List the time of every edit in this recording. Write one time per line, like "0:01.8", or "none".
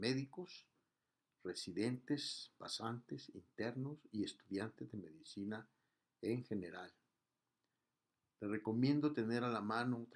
none